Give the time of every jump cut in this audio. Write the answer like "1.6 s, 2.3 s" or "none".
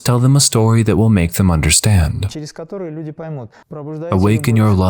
2.3 s, 3.8 s